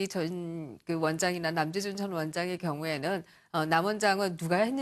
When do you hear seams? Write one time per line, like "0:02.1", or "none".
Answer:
none